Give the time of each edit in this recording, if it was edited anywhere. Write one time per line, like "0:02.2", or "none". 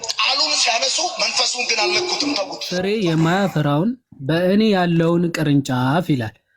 0:02.7

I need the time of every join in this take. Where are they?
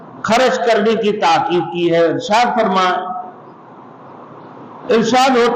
none

